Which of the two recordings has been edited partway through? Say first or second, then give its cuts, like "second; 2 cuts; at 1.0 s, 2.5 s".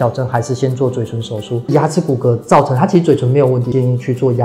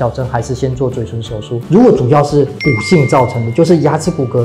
first; 2 cuts; at 1.7 s, 3.7 s